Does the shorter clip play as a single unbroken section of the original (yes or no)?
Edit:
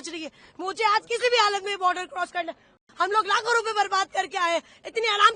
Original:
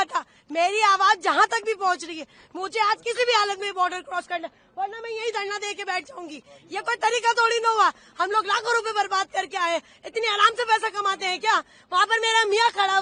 no